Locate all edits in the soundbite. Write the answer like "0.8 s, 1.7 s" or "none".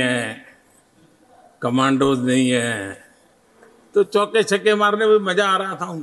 none